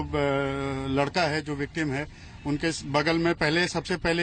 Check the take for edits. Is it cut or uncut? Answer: uncut